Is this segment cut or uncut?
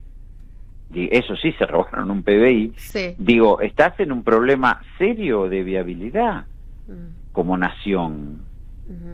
uncut